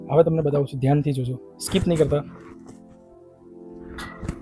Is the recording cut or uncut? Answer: uncut